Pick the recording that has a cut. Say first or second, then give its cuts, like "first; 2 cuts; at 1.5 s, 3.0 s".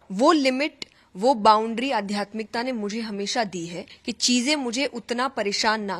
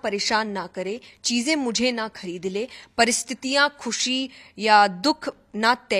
first; 1 cut; at 3.9 s